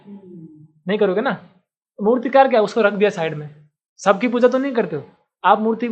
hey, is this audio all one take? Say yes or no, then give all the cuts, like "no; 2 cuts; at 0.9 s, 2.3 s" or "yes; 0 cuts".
yes; 0 cuts